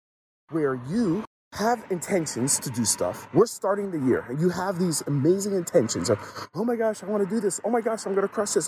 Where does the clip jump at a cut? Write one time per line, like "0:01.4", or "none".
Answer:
0:01.4